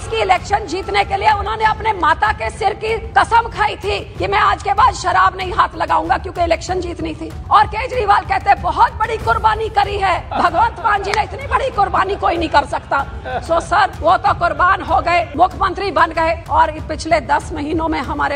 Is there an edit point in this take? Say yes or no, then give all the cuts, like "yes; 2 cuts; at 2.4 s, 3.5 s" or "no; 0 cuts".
yes; 7 cuts; at 3.0 s, 4.1 s, 7.3 s, 10.3 s, 14.0 s, 15.3 s, 16.4 s